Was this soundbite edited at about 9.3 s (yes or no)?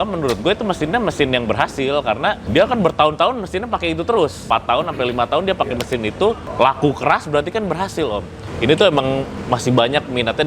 yes